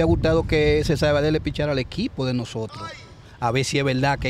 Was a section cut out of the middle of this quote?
no; 0 cuts

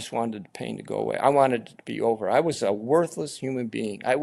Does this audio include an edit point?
no; 0 cuts

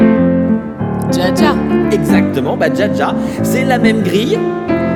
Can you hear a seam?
no; 0 cuts

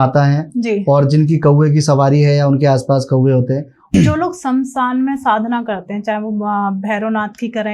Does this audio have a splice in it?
yes; 1 cut; at 3.9 s

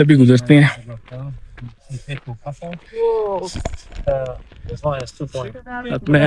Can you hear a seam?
no; 0 cuts

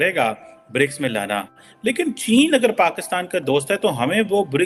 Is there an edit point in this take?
no; 0 cuts

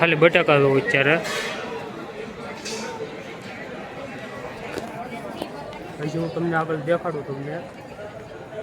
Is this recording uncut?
yes; 0 cuts

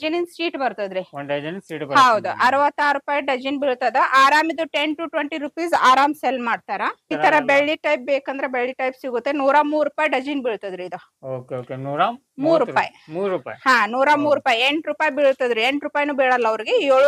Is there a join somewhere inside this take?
yes; 1 cut; at 7.1 s

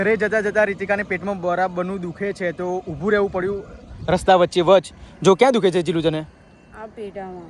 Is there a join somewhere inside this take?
no; 0 cuts

